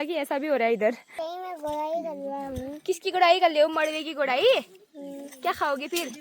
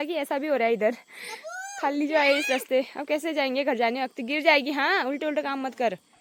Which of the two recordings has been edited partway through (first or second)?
first